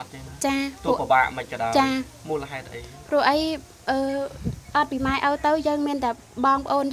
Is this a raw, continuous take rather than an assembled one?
yes; 0 cuts

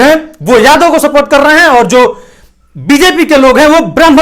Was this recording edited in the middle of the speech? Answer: no; 0 cuts

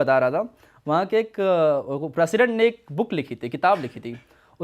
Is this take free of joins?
yes; 0 cuts

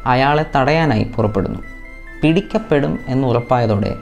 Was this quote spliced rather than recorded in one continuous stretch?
no; 0 cuts

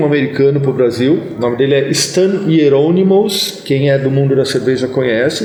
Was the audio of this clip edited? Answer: no; 0 cuts

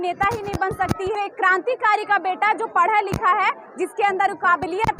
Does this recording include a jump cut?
yes; 1 cut; at 1.1 s

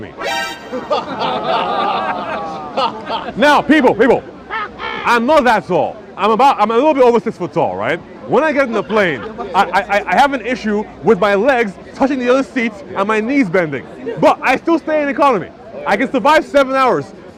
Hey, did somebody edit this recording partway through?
no; 0 cuts

